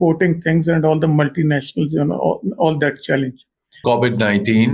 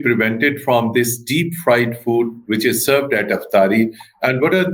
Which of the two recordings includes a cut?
first; 1 cut; at 3.8 s

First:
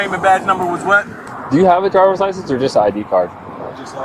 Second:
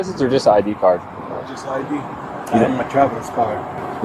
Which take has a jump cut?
first; 1 cut; at 1.2 s

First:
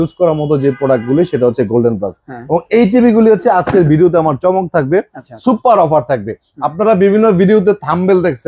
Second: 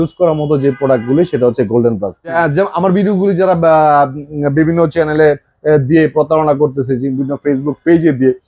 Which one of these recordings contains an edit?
second; 1 cut; at 2.4 s

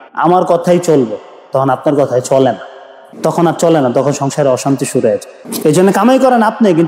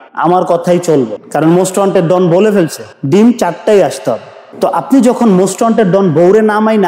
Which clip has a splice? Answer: second; 1 cut; at 1.2 s

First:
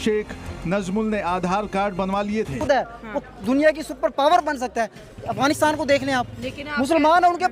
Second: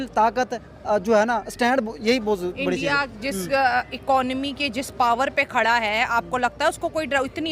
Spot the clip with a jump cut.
first; 1 cut; at 2.6 s

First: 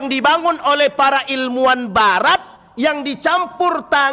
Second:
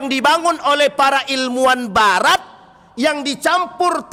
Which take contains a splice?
first; 1 cut; at 2.6 s

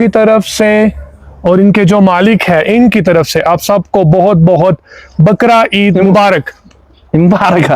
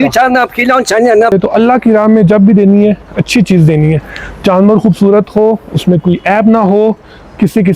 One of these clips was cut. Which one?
second; 1 cut; at 1.3 s

